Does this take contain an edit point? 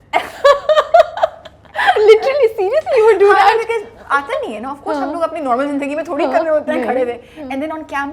no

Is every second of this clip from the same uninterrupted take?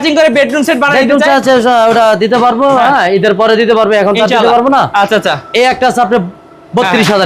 yes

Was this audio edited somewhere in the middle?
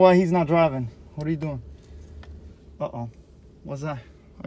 no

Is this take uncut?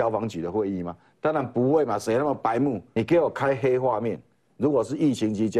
no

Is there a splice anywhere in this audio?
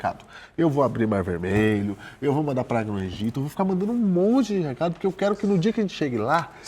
no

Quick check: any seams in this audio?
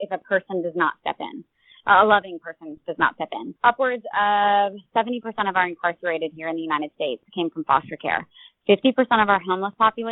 yes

